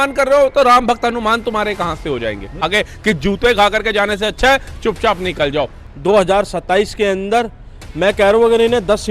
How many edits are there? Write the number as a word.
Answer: two